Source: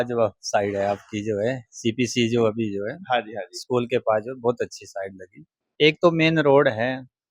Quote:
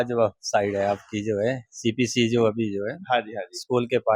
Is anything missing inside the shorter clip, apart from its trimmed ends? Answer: no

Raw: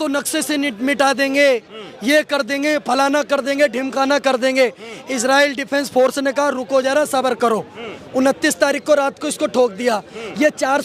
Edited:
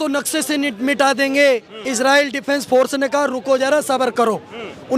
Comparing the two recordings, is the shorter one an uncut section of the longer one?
no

